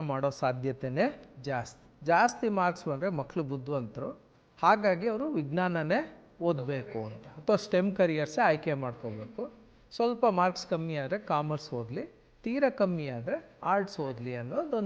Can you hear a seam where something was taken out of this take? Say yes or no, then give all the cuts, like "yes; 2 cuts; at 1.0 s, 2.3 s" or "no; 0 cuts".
yes; 1 cut; at 1.8 s